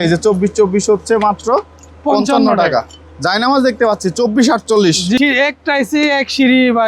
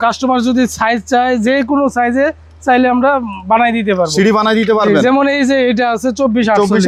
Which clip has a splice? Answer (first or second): first